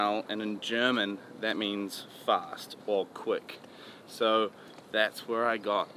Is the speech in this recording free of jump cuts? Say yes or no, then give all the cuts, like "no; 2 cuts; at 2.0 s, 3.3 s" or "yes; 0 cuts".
yes; 0 cuts